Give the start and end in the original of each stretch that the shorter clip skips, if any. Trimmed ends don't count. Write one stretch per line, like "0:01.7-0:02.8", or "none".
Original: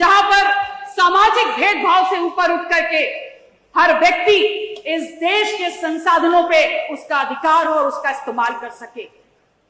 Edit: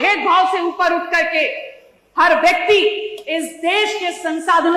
none